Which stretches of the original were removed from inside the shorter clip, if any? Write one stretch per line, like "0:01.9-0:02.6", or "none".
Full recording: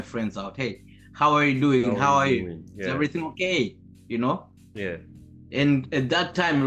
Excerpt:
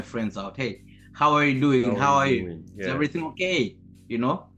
none